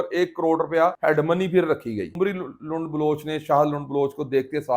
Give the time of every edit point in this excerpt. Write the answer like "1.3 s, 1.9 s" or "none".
1.0 s, 2.1 s